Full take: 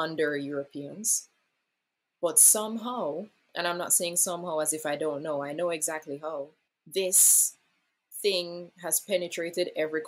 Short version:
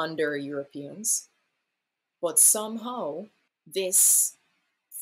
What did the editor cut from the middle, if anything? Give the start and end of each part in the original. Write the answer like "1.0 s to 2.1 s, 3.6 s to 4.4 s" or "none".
3.4 s to 6.6 s

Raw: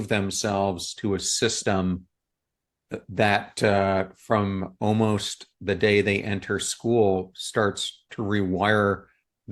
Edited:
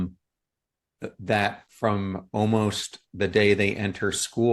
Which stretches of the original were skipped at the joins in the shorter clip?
3.5 s to 4.1 s

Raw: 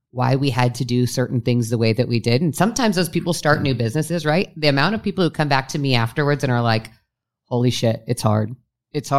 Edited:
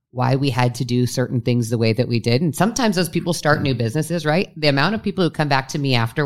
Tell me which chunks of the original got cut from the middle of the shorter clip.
none

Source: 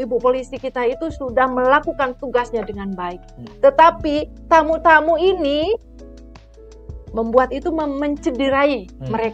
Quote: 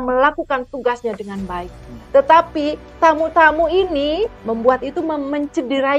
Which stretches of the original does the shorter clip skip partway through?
5.9 s to 7.1 s

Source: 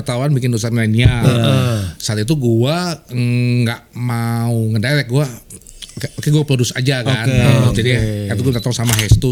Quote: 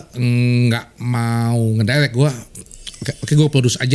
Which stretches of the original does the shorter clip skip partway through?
none

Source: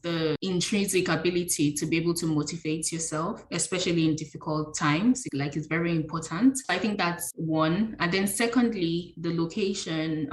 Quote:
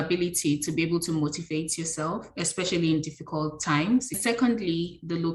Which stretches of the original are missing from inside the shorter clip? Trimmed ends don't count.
5.3 s to 8.3 s

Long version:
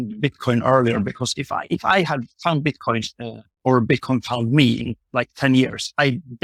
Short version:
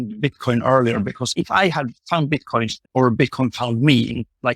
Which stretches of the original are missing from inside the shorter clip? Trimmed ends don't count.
1.3 s to 1.6 s, 3.1 s to 3.5 s

